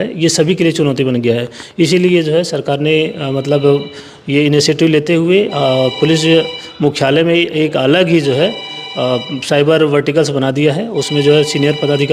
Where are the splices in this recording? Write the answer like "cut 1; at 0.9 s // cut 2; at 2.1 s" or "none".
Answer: none